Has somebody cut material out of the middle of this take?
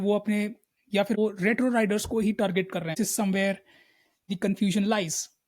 yes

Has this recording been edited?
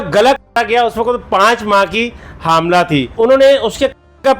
yes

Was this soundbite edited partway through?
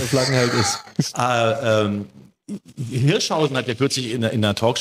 yes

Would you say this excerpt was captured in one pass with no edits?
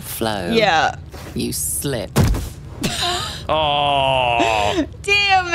yes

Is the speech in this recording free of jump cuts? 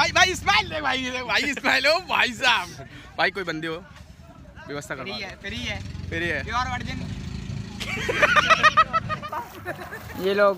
no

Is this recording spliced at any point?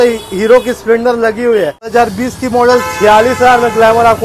yes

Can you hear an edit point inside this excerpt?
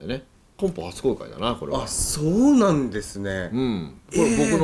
no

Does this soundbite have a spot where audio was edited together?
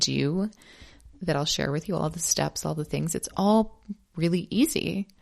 no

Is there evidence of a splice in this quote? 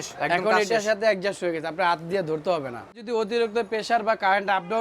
yes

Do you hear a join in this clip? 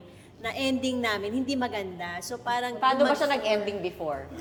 no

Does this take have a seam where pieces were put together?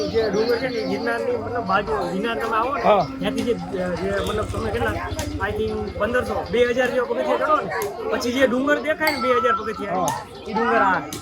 no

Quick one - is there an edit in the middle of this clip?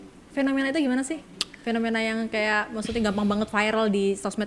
no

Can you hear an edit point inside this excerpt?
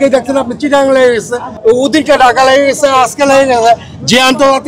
yes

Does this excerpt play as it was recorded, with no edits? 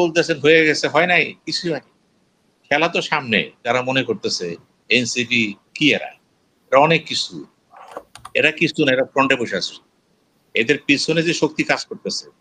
no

